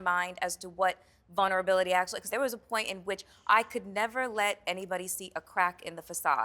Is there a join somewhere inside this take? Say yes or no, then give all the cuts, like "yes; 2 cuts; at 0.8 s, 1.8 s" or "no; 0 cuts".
yes; 1 cut; at 2.3 s